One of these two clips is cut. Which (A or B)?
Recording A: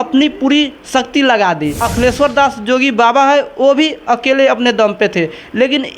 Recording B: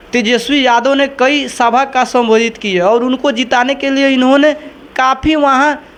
A